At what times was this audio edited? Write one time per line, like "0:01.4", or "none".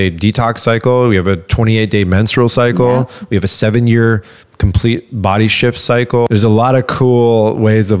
0:06.3

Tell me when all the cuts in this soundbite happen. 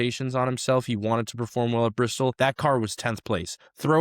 0:02.3

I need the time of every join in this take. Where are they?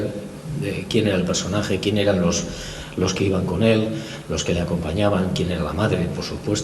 none

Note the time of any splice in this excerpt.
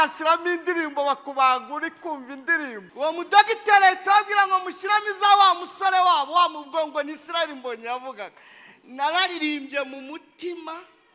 0:02.8

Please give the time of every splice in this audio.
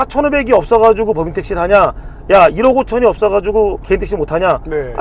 none

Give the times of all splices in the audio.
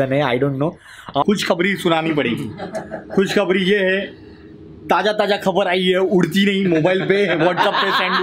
0:01.2

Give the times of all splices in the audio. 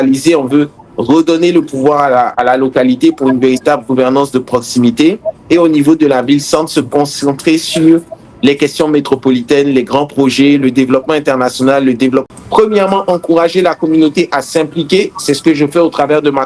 0:12.3

